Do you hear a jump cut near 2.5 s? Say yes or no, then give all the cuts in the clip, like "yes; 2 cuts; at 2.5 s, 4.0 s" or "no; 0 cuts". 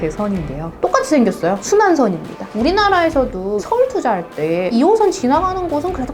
yes; 1 cut; at 2.5 s